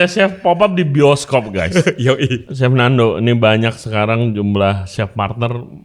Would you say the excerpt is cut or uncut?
cut